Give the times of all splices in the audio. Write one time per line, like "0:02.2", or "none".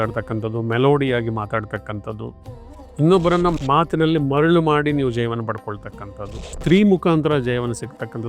0:06.4

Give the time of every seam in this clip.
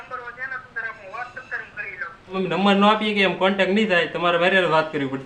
0:02.3

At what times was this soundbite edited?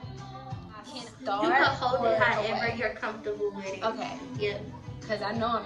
0:00.9

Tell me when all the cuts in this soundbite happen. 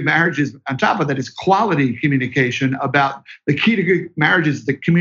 none

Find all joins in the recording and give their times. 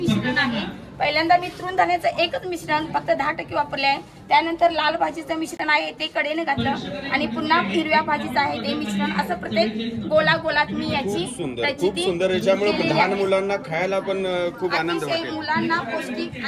none

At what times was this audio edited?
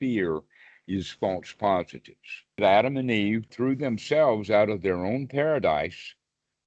0:02.6
0:03.5

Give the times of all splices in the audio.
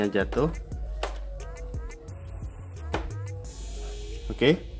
none

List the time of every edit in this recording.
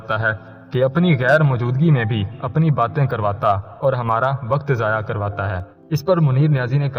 0:05.7

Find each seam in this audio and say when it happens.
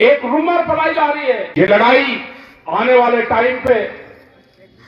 0:01.5

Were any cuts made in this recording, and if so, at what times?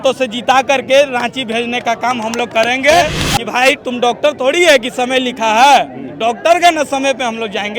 0:03.2

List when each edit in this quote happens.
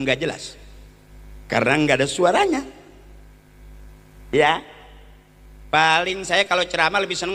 none

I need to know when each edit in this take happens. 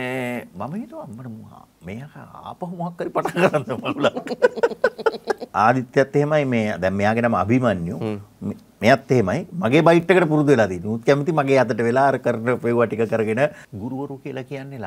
0:05.4
0:13.6

